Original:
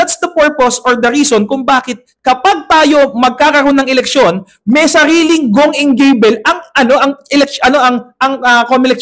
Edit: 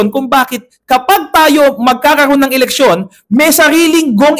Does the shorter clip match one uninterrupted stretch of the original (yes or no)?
yes